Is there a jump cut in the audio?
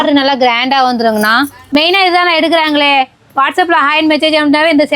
yes; 1 cut; at 1.7 s

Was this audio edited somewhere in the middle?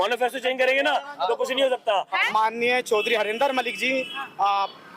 yes; 1 cut; at 2.2 s

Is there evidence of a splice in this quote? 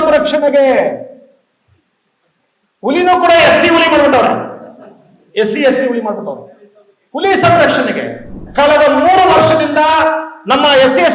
yes; 1 cut; at 8.4 s

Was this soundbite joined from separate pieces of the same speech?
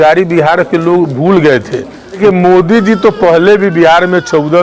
yes; 1 cut; at 2.2 s

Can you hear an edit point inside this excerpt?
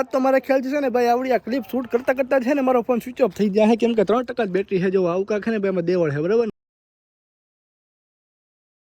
no; 0 cuts

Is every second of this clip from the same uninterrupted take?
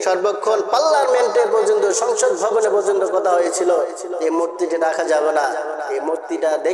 yes; 0 cuts

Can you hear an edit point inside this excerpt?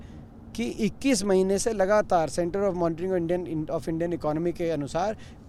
no; 0 cuts

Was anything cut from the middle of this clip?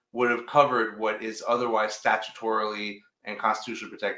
no; 0 cuts

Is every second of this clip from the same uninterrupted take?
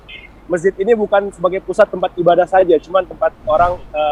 yes; 0 cuts

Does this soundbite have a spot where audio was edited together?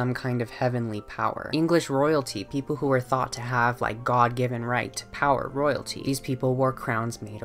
no; 0 cuts

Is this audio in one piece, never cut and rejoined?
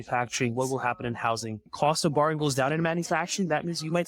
no; 1 cut; at 1.7 s

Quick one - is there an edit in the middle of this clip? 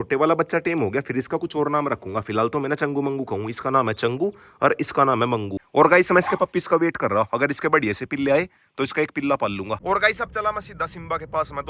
yes; 2 cuts; at 5.5 s, 9.8 s

